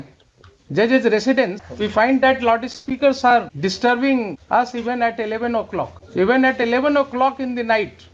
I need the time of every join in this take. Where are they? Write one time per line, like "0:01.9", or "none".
0:01.6
0:03.5
0:04.4
0:06.0